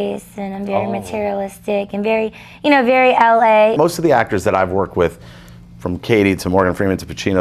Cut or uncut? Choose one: cut